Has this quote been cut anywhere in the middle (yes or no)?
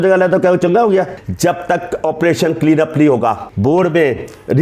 yes